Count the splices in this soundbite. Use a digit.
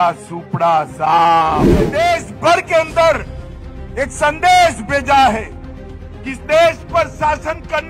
1